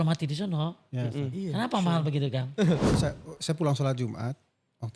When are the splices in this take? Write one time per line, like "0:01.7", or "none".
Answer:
0:03.0